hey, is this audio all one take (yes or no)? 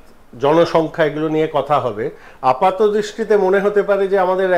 yes